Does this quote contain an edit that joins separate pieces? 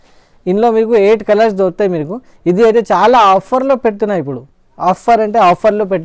no; 0 cuts

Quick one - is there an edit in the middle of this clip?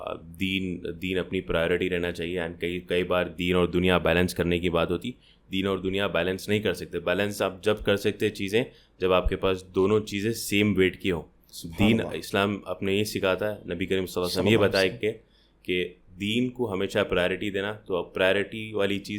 no; 0 cuts

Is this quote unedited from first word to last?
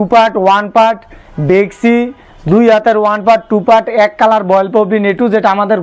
yes; 0 cuts

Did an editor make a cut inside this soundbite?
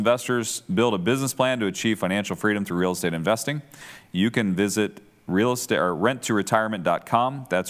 no; 0 cuts

